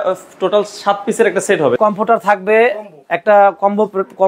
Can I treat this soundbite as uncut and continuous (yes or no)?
no